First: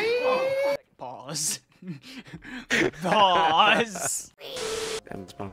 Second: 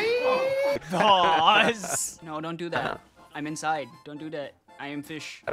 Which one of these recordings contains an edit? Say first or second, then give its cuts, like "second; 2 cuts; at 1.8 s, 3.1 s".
second; 2 cuts; at 0.9 s, 2.1 s